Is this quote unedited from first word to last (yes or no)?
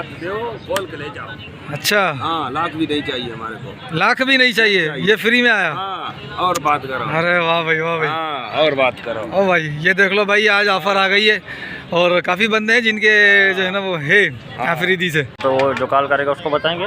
no